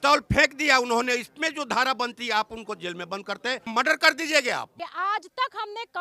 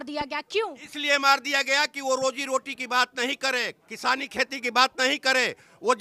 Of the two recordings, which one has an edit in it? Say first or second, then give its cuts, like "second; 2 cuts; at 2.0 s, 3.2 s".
first; 2 cuts; at 3.6 s, 4.7 s